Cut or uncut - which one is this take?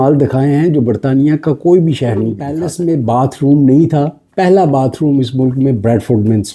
cut